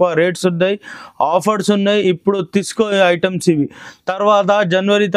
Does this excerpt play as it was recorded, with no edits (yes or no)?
yes